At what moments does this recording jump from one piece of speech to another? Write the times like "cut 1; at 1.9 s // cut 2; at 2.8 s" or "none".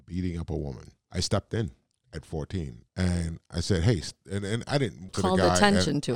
cut 1; at 0.9 s // cut 2; at 2.8 s // cut 3; at 5.1 s